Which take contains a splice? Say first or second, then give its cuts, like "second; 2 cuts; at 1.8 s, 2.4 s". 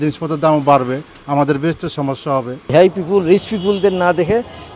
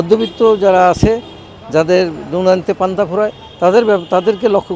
first; 1 cut; at 2.7 s